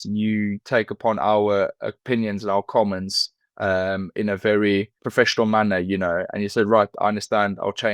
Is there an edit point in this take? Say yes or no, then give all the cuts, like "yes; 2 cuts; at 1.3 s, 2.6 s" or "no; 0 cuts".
no; 0 cuts